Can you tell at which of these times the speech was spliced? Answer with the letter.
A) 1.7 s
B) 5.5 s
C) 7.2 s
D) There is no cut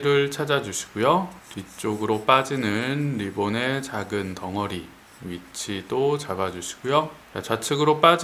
D